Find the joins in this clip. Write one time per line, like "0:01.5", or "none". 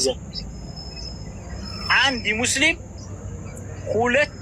none